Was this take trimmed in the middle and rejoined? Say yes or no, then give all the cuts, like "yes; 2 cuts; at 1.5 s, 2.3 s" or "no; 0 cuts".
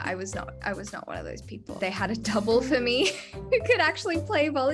yes; 1 cut; at 1.8 s